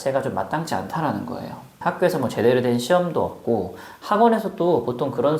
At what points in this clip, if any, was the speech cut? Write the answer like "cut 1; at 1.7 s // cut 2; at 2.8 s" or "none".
cut 1; at 1.7 s